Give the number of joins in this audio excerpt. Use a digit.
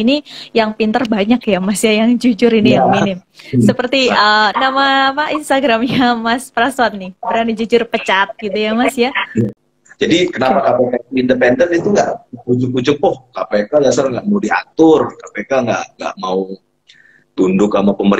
2